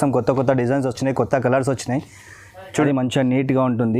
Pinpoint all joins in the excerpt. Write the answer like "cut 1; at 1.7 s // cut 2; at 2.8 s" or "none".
cut 1; at 2.9 s